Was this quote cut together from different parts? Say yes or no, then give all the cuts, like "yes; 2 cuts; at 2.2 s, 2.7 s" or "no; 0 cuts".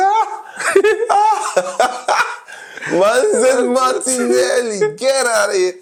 no; 0 cuts